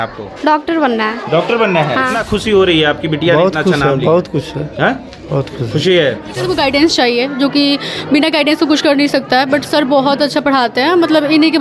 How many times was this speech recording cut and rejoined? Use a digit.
2